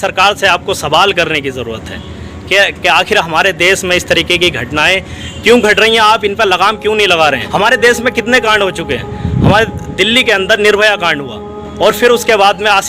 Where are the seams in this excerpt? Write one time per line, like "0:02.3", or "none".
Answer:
0:07.4